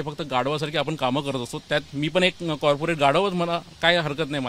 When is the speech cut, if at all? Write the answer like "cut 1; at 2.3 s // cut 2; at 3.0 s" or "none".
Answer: none